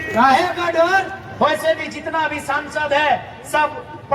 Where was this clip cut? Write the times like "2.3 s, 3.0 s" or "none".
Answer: 1.2 s